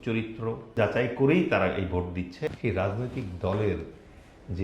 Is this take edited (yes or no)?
yes